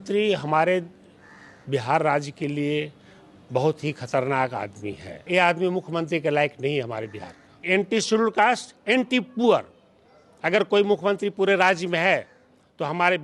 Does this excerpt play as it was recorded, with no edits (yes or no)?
no